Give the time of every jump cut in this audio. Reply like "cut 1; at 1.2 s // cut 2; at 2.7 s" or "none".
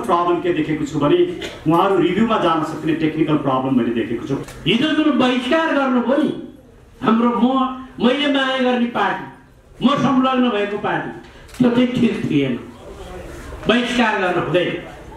cut 1; at 4.4 s